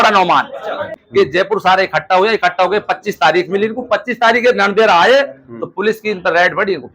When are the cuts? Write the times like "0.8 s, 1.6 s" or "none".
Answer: 1.0 s

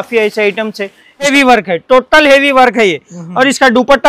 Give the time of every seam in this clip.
1.3 s

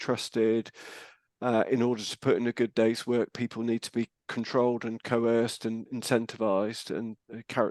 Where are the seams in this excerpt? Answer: none

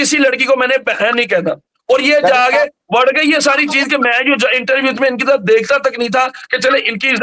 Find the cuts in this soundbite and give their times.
none

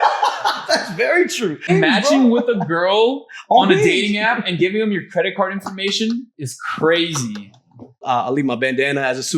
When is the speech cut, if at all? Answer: 1.7 s, 8.0 s

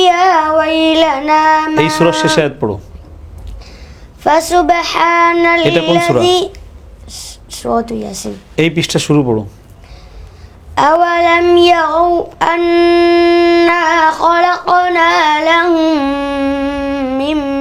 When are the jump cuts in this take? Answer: none

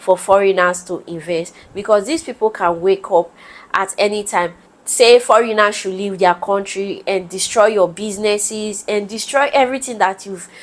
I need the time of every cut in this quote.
none

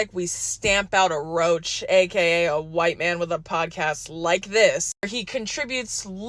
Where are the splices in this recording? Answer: 4.9 s

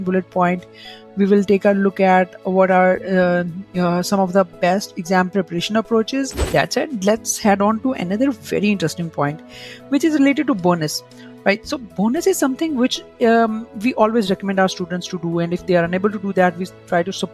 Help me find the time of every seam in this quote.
6.4 s

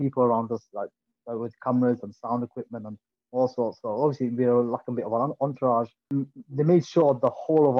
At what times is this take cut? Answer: 6.0 s

